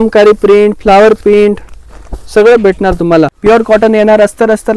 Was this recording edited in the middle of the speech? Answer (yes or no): yes